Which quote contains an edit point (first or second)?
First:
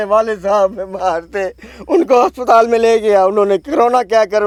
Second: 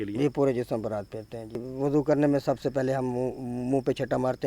second